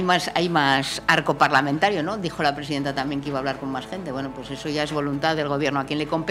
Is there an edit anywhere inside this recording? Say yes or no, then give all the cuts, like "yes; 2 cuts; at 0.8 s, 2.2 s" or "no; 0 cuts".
no; 0 cuts